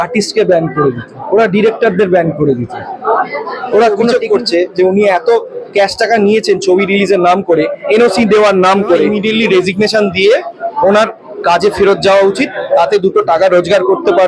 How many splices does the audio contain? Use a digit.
2